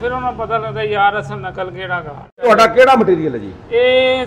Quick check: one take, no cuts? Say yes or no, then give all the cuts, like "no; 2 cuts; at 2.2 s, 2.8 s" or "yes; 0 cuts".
no; 1 cut; at 2.4 s